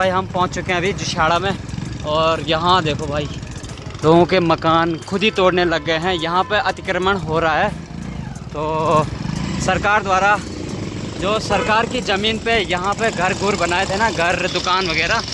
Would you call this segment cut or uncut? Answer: uncut